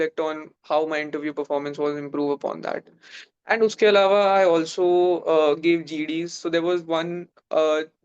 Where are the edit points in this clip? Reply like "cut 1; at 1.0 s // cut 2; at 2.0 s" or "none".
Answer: none